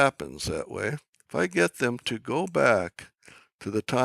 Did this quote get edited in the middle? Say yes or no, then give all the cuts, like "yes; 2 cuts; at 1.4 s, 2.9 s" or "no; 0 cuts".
no; 0 cuts